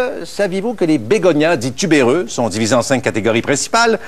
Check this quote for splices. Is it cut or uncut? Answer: cut